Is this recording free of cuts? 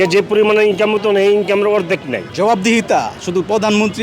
no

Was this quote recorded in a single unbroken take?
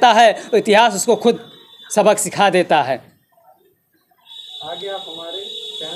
yes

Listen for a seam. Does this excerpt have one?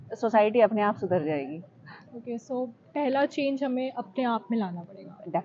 no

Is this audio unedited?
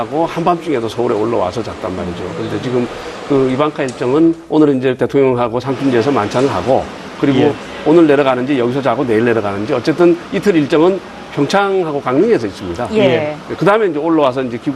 yes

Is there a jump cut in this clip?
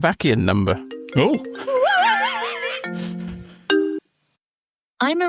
no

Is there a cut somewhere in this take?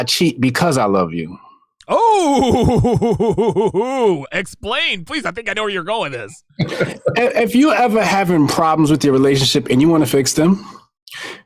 no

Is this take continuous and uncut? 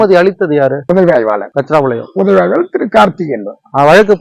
yes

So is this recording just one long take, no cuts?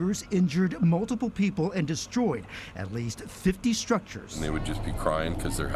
no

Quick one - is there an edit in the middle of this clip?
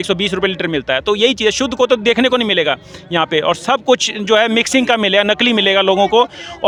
no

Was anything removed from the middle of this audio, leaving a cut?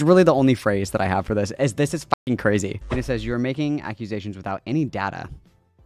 yes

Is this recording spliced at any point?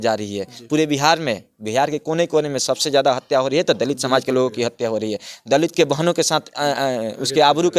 no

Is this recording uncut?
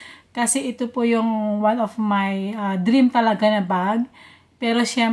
yes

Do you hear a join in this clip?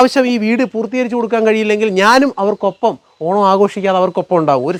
no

